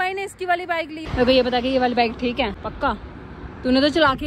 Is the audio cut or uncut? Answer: cut